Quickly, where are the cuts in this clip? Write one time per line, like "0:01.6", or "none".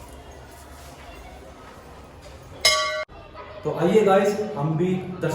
0:03.2